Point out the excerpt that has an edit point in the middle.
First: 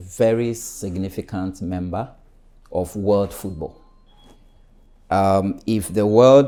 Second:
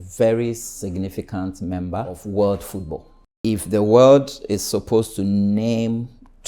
second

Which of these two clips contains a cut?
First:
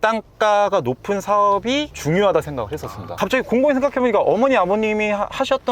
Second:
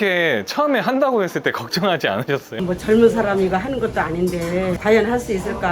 first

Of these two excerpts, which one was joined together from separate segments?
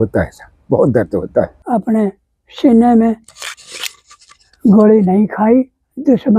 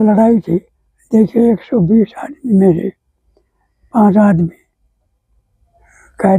first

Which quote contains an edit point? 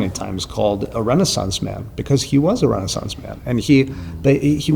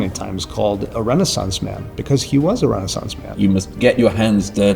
second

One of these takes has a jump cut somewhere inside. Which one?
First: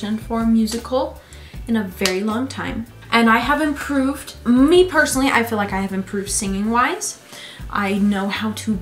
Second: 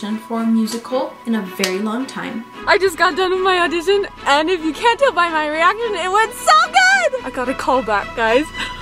second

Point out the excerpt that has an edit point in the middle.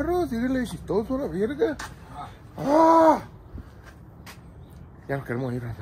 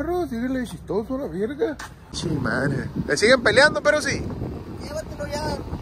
second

